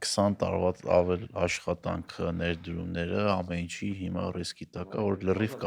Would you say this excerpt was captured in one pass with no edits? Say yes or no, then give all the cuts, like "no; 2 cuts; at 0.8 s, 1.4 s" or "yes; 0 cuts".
yes; 0 cuts